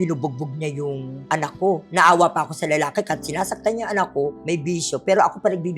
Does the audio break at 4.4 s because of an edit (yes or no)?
yes